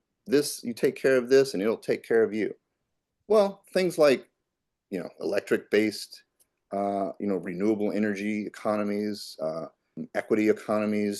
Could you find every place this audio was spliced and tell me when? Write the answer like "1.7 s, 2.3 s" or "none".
10.0 s